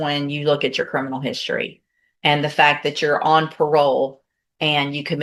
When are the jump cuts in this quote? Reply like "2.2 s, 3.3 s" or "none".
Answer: none